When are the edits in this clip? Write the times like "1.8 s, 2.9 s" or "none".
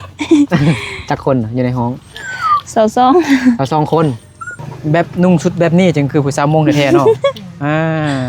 4.7 s